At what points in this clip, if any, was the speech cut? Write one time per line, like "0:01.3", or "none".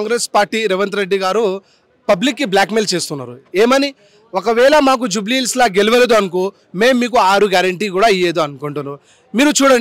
none